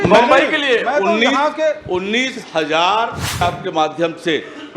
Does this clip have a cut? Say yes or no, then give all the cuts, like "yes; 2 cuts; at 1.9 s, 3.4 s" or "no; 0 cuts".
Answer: yes; 1 cut; at 3.4 s